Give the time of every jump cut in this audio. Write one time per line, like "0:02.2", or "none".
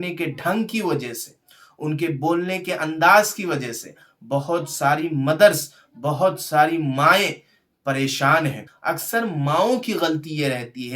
0:08.7